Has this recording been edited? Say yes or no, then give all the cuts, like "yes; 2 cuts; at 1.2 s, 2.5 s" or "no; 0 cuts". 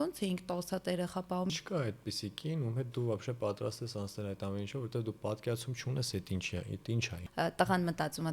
yes; 2 cuts; at 1.5 s, 7.2 s